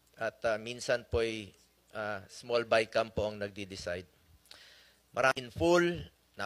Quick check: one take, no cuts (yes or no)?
no